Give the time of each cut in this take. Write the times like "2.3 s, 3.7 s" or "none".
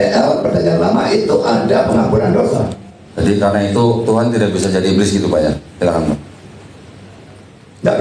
3.0 s